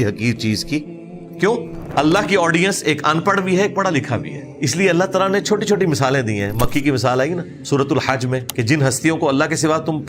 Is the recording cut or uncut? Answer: cut